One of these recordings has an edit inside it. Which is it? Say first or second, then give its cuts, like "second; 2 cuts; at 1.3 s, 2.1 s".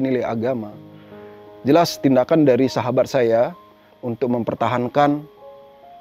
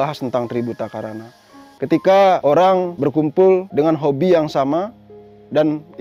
second; 1 cut; at 1.7 s